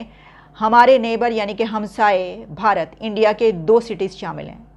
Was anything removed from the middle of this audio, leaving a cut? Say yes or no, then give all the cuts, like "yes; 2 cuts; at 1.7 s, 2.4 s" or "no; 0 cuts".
no; 0 cuts